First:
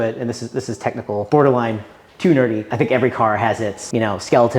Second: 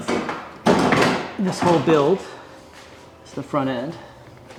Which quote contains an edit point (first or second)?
first